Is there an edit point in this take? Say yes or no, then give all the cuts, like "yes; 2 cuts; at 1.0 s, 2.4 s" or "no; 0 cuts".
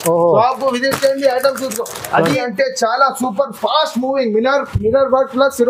yes; 1 cut; at 2.4 s